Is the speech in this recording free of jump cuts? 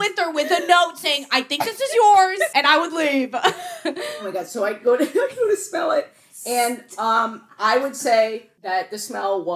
no; 3 cuts; at 2.5 s, 4.1 s, 8.5 s

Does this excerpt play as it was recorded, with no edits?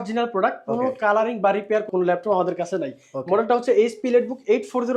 yes; 0 cuts

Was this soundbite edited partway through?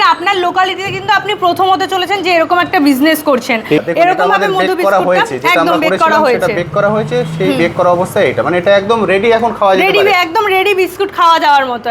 yes; 1 cut; at 3.8 s

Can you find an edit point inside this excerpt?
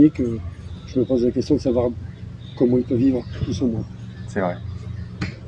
no; 0 cuts

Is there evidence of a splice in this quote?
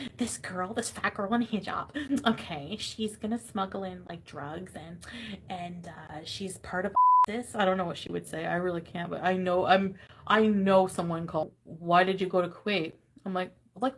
yes; 1 cut; at 11.5 s

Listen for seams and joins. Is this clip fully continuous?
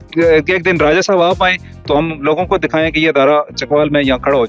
yes; 0 cuts

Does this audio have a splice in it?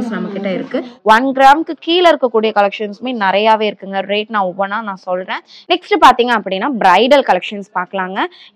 yes; 2 cuts; at 0.9 s, 5.7 s

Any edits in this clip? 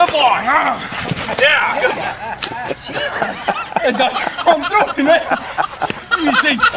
no; 0 cuts

